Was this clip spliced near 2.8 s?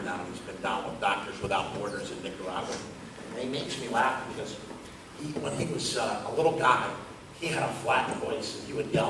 yes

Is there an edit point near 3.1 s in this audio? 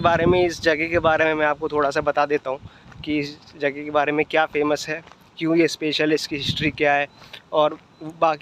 no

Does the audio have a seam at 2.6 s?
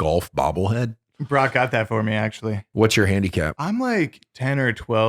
yes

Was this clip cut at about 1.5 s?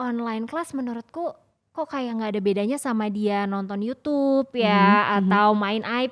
no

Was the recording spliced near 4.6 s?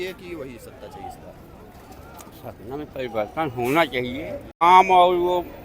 yes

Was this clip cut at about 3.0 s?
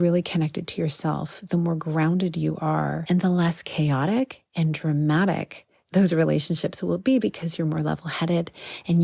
yes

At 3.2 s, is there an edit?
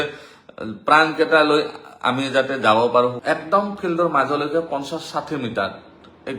yes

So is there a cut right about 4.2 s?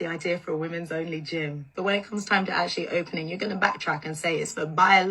no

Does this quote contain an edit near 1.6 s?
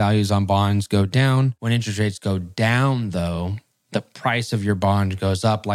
yes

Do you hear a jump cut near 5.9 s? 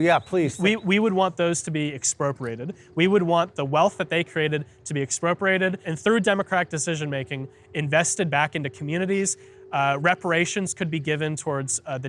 yes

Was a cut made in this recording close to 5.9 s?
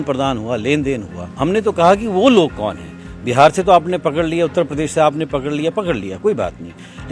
no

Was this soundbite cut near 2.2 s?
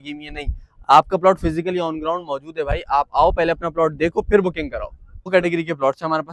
no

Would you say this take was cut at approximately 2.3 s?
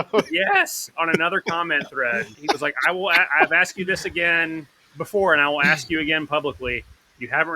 yes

